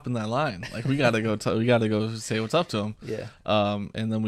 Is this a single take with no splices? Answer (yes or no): yes